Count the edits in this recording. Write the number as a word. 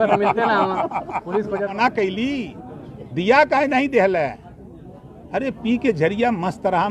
one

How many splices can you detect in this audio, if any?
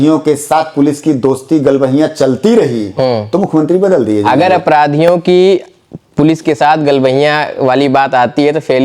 zero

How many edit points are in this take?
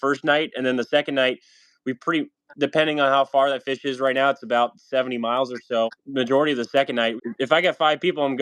two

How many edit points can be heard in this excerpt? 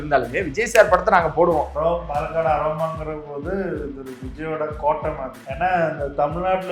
two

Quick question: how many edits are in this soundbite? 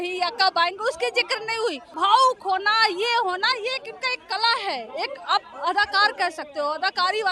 one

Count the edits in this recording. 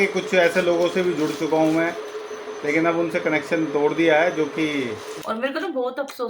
one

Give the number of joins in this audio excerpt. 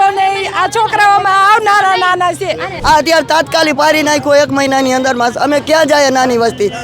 one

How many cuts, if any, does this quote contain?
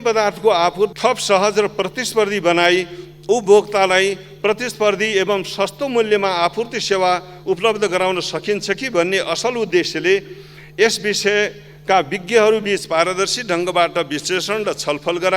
one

